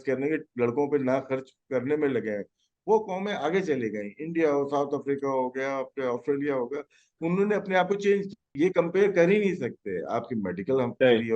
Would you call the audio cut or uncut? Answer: cut